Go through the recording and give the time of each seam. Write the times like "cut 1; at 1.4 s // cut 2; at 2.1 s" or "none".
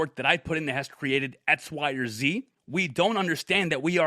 cut 1; at 2.6 s